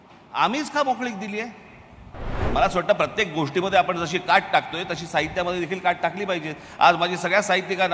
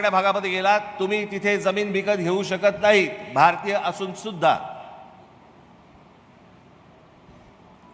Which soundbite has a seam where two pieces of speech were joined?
first; 1 cut; at 2.4 s

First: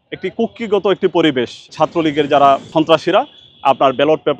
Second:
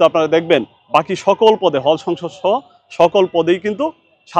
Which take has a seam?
first; 2 cuts; at 1.7 s, 2.7 s

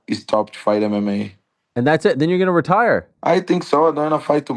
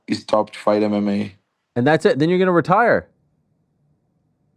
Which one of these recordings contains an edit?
first; 1 cut; at 3.1 s

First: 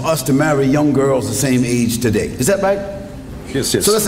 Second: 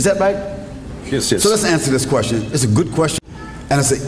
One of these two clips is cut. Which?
second; 1 cut; at 3.1 s

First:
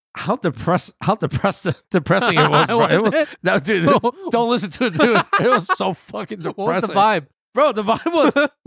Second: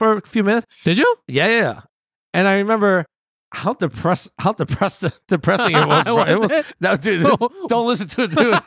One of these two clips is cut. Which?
second; 1 cut; at 1.8 s

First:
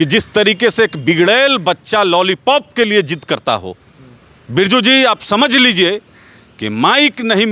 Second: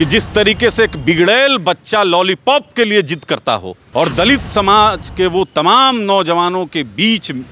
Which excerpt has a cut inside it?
second; 1 cut; at 3.8 s

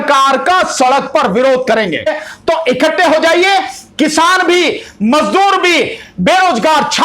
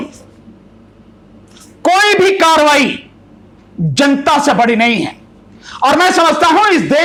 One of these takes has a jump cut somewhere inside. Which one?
first; 1 cut; at 2.1 s

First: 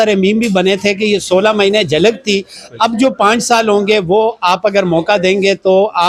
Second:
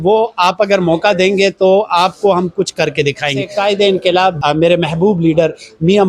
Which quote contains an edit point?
second; 2 cuts; at 3.4 s, 4.4 s

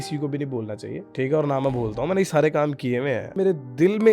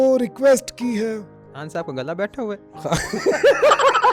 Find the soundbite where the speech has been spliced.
first; 2 cuts; at 1.1 s, 3.3 s

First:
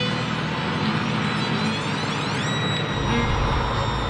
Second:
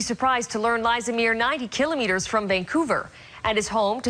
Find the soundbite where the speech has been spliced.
first; 1 cut; at 1.9 s

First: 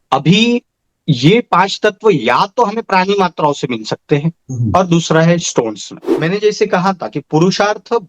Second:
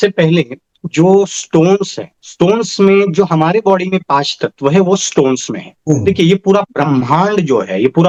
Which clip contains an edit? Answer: first; 1 cut; at 6.1 s

